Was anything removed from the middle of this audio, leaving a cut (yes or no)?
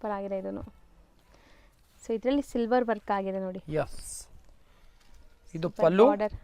no